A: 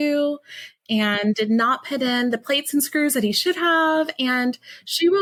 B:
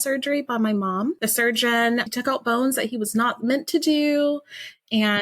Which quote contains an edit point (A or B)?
B